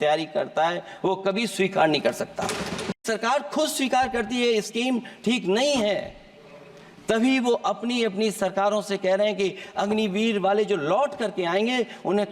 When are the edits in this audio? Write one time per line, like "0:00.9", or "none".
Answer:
0:03.0